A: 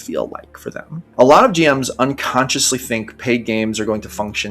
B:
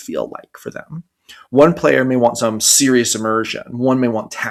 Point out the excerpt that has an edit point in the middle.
A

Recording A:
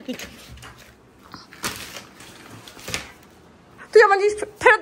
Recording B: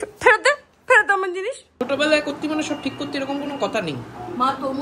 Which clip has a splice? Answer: B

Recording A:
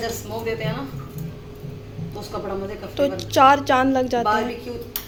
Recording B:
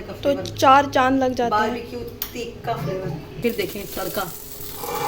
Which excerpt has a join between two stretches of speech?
B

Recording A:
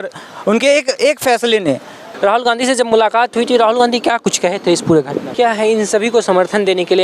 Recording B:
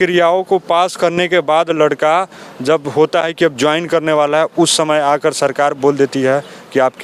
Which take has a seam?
A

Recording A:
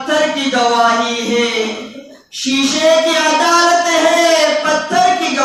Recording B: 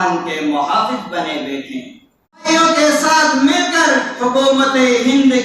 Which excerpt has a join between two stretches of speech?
B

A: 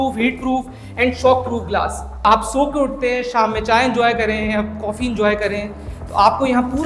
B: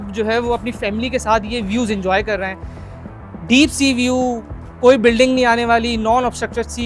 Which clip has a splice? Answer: A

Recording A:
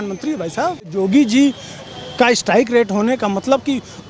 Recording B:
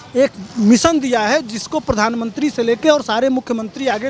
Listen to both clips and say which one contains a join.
A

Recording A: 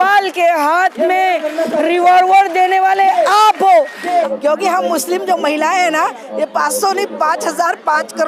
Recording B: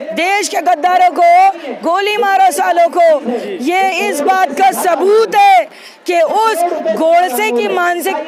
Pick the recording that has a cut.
A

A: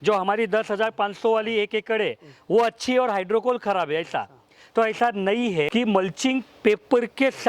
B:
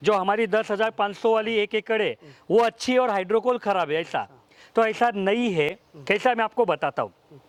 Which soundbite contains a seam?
A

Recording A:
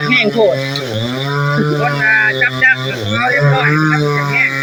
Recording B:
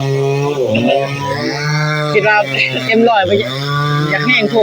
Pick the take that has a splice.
B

